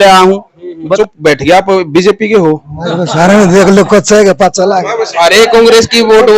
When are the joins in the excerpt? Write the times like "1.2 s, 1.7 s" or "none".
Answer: 0.9 s